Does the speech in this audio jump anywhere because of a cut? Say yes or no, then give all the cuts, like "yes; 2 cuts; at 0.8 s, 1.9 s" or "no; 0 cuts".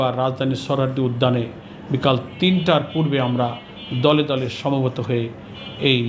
no; 0 cuts